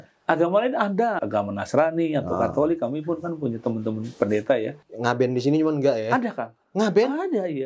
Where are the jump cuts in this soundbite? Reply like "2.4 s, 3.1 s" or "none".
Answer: 1.2 s, 4.8 s